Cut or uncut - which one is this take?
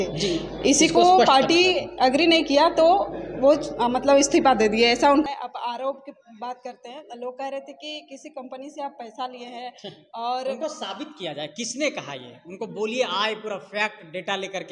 cut